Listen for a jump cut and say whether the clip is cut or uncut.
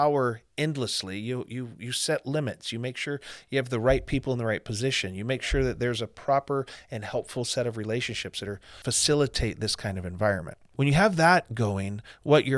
cut